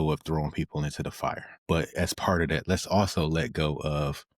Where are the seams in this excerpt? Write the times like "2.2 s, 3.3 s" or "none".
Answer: 1.5 s